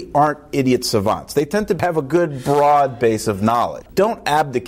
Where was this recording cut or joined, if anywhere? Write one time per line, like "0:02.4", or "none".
0:01.8
0:03.9